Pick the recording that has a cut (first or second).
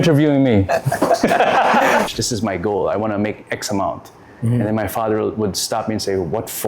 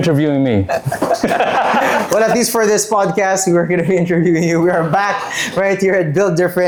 first